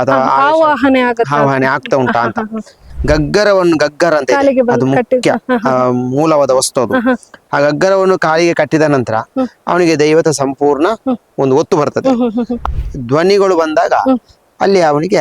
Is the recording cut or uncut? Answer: cut